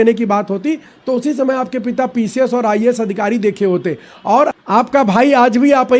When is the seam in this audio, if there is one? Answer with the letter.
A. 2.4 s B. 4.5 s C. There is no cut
B